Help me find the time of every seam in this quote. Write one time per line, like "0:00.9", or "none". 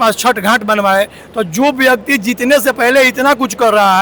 none